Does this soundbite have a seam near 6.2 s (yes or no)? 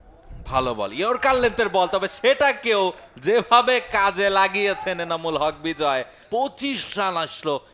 yes